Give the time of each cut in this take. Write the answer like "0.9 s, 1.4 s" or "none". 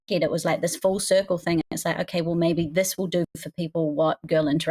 none

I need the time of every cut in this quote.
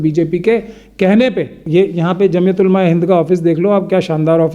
1.5 s

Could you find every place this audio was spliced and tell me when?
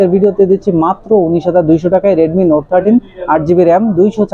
none

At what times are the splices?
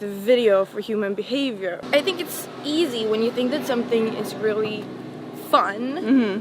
1.8 s

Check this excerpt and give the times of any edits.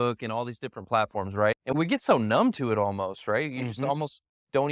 1.7 s

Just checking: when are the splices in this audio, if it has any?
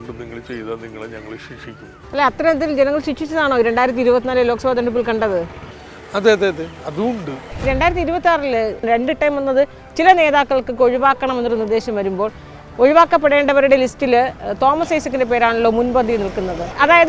2.0 s, 7.4 s

